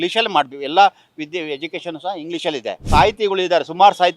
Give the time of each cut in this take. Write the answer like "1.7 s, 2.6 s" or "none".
2.8 s